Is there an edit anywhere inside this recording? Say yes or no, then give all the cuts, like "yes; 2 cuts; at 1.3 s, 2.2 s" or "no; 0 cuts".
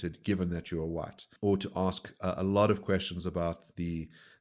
yes; 1 cut; at 1.2 s